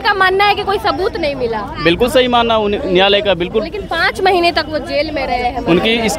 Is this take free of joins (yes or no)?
yes